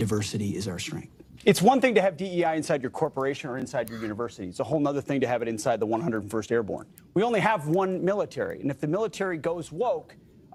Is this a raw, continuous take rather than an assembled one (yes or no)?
yes